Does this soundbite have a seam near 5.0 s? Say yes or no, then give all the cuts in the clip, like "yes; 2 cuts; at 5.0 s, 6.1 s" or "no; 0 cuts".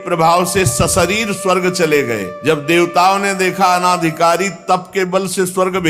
no; 1 cut; at 2.3 s